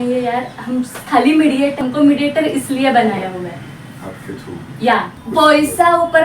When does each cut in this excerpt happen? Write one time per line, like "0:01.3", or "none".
0:01.8
0:05.2

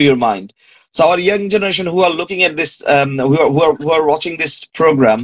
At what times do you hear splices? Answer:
none

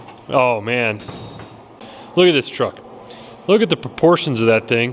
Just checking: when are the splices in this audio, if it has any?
0:01.9

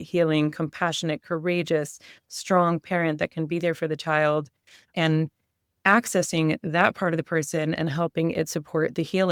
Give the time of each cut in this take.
none

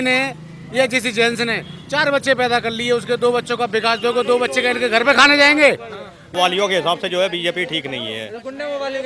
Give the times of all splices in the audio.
0:06.3

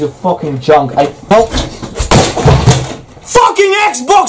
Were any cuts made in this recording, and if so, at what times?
0:01.3

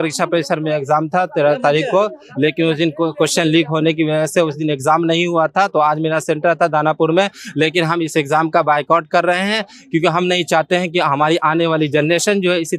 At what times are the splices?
none

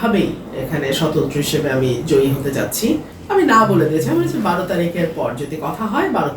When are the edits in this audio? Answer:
0:03.1

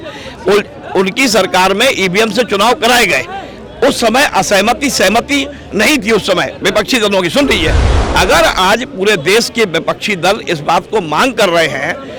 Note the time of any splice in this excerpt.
none

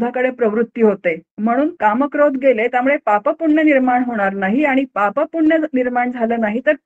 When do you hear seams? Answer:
0:01.3

